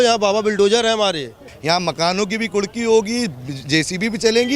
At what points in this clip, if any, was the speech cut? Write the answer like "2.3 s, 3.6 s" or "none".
1.5 s